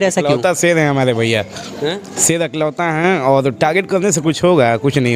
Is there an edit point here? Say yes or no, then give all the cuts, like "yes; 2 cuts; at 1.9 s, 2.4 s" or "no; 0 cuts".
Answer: no; 0 cuts